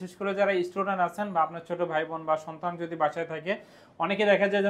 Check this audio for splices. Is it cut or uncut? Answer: uncut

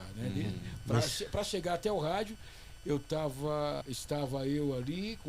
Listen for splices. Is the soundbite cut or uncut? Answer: cut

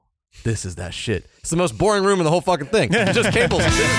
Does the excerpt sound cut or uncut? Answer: uncut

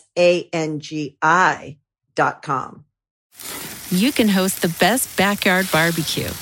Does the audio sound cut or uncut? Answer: cut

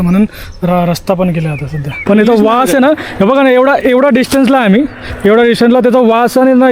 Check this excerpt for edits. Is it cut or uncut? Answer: cut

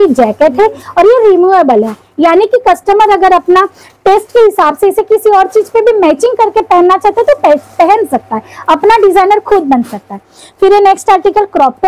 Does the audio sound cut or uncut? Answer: uncut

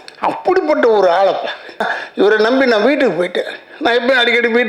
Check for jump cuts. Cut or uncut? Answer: cut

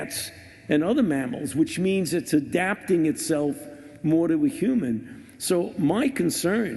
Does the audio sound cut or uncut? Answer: cut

